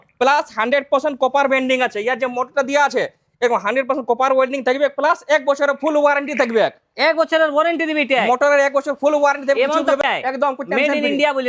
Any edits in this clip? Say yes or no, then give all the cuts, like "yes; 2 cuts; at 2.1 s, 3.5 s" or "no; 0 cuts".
yes; 1 cut; at 10.0 s